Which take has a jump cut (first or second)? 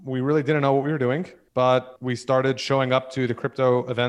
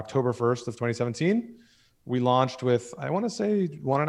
first